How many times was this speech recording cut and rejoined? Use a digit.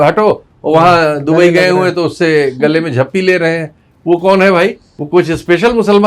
1